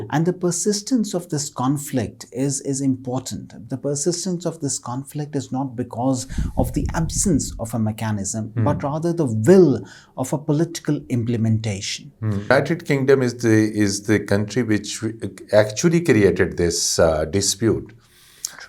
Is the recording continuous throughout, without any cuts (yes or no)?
no